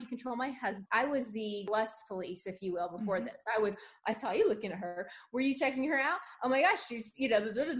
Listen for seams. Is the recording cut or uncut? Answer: cut